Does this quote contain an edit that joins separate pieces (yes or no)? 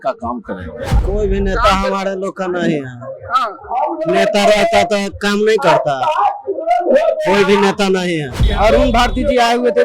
yes